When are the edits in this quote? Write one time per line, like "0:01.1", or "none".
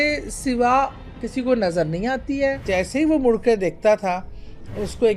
0:02.6